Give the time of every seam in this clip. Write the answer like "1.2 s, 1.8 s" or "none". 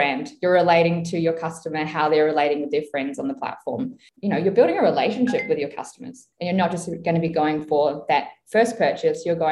4.1 s, 6.3 s